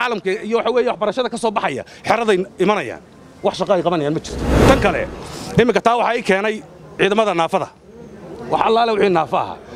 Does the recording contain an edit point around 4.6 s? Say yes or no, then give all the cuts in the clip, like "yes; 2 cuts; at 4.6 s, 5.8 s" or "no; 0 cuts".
yes; 1 cut; at 4.6 s